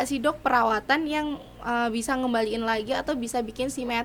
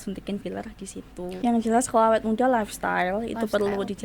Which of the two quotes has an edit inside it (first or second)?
second